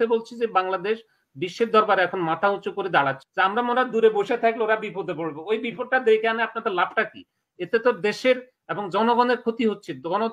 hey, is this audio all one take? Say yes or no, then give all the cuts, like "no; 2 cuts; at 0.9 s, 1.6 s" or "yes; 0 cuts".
no; 1 cut; at 3.2 s